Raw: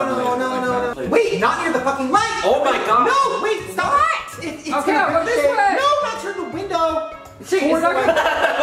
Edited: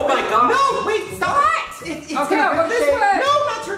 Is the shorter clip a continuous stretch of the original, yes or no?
yes